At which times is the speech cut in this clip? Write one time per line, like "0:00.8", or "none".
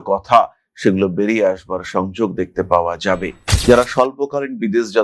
0:03.4